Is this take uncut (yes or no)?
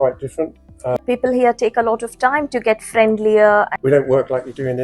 no